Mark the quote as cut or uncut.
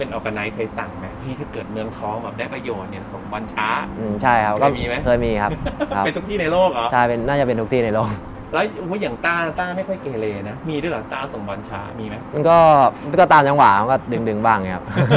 uncut